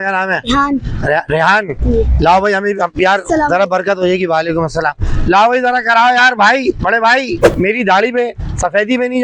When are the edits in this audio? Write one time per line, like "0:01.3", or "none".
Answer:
0:07.5